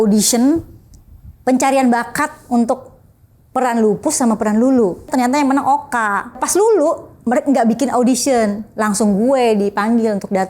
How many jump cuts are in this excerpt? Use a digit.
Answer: 2